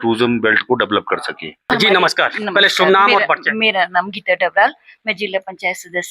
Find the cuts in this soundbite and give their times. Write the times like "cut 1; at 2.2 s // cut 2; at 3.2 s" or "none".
cut 1; at 1.6 s